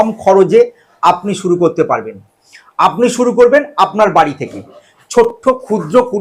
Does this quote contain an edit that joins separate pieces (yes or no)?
no